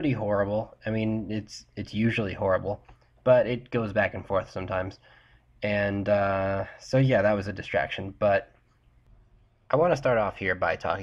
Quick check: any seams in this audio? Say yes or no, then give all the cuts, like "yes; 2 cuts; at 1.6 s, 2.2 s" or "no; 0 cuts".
yes; 1 cut; at 7.1 s